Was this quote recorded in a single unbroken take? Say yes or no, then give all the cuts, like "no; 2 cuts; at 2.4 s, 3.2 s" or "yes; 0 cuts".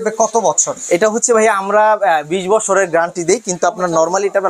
yes; 0 cuts